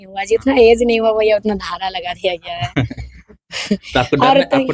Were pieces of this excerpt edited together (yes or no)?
no